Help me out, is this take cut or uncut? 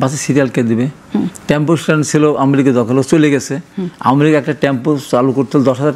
uncut